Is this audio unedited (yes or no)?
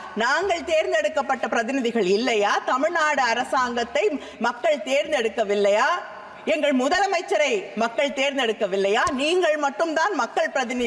yes